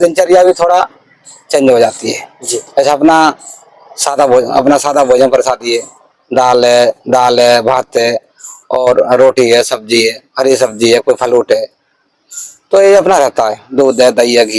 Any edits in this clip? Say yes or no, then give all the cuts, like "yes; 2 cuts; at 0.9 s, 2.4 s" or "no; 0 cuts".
no; 0 cuts